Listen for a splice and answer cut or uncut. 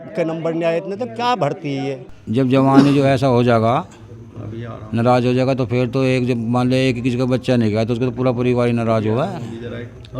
cut